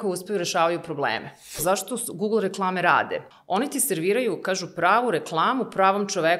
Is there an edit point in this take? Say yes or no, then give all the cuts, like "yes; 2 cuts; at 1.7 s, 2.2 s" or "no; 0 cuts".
yes; 2 cuts; at 1.6 s, 3.3 s